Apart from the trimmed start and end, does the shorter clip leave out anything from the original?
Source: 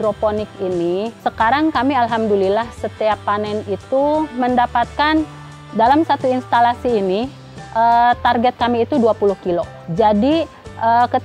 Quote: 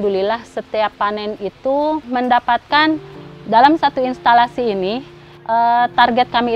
no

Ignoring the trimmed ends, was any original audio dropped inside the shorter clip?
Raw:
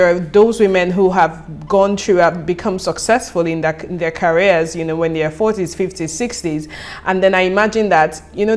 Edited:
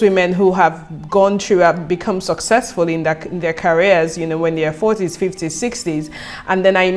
no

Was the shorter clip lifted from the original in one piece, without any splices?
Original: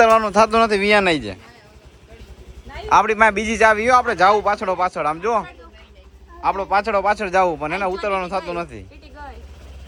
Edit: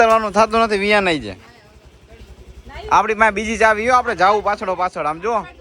yes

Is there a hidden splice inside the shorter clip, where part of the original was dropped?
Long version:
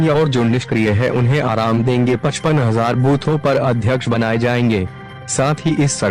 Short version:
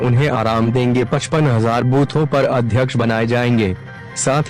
no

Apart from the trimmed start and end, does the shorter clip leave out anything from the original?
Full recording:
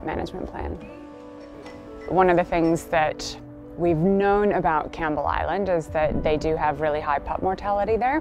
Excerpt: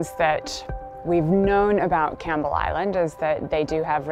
no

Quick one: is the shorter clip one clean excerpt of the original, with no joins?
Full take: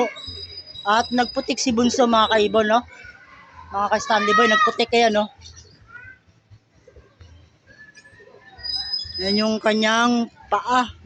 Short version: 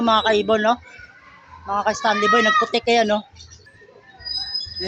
no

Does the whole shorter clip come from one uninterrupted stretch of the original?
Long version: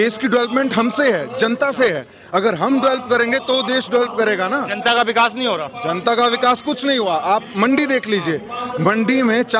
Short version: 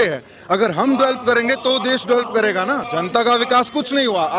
no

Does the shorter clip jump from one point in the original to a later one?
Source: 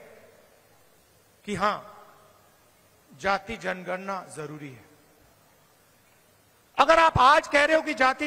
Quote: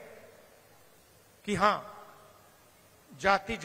no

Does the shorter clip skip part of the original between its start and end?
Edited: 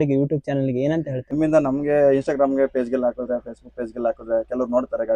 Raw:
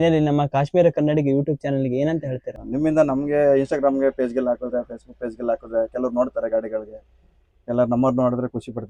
yes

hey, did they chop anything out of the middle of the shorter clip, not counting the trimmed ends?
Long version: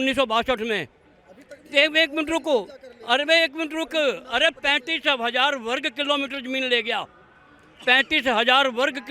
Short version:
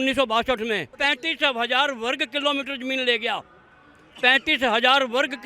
yes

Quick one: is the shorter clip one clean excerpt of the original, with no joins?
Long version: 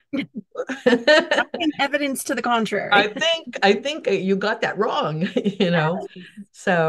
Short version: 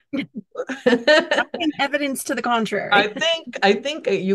yes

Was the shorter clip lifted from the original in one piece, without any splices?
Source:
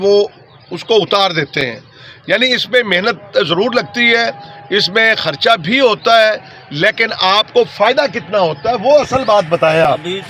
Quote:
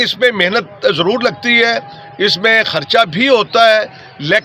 yes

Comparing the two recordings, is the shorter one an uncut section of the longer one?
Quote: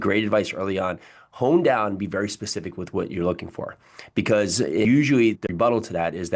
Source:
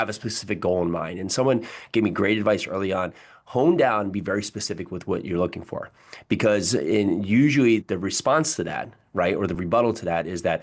no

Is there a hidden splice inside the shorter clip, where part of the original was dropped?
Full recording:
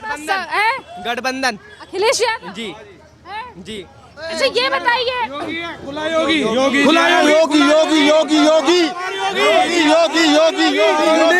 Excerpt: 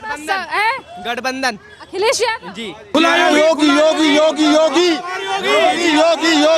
yes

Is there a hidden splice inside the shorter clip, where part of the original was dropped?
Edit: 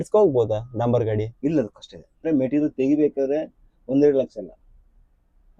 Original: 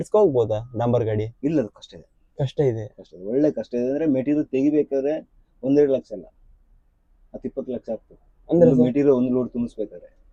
yes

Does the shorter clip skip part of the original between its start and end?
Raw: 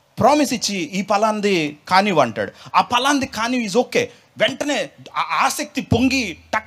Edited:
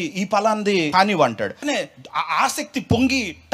yes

